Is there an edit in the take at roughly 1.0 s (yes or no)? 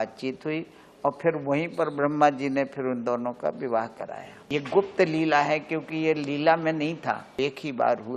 no